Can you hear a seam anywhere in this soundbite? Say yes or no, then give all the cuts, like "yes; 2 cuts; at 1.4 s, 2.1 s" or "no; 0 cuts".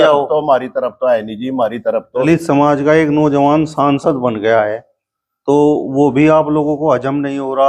yes; 1 cut; at 2.2 s